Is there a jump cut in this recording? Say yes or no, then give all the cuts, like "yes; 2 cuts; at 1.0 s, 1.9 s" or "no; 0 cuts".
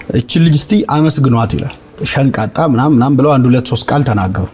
yes; 1 cut; at 2.0 s